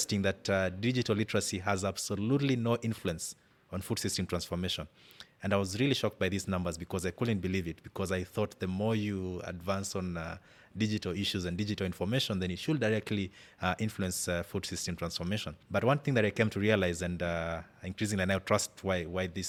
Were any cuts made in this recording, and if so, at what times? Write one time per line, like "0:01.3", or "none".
none